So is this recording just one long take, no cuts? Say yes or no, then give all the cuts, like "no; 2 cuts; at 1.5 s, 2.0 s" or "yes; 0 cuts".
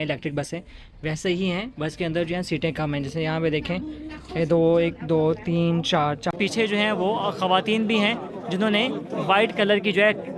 no; 1 cut; at 6.3 s